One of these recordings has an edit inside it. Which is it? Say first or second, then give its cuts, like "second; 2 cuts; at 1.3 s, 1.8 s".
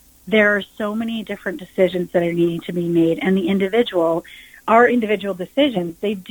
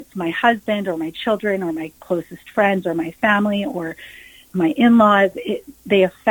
second; 1 cut; at 4.5 s